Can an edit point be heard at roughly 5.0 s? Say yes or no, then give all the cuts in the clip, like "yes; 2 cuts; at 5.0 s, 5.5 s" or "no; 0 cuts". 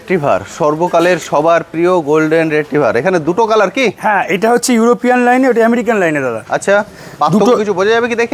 no; 0 cuts